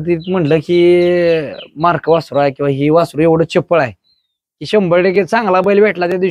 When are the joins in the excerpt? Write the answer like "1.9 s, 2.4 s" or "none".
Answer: none